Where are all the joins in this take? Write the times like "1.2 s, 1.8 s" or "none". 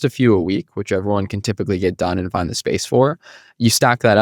none